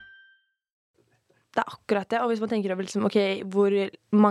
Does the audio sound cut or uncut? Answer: cut